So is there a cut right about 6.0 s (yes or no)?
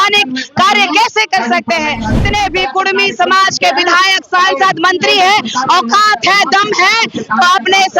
no